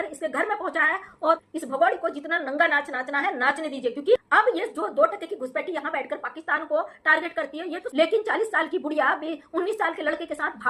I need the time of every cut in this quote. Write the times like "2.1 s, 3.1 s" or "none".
1.4 s, 4.2 s, 7.8 s